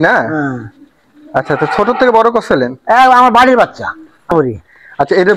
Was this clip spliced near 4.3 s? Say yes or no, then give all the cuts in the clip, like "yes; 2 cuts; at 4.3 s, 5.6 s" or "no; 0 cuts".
yes; 1 cut; at 4.3 s